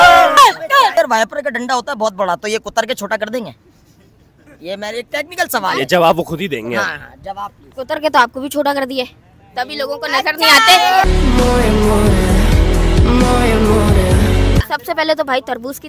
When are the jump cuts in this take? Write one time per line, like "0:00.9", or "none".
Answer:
0:00.9
0:14.6